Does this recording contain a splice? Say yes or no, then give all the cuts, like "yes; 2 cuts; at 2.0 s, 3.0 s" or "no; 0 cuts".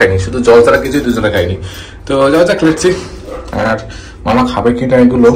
no; 0 cuts